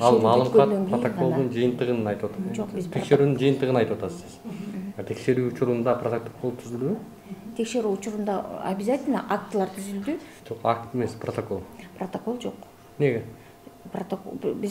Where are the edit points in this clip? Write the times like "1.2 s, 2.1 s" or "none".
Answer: 10.4 s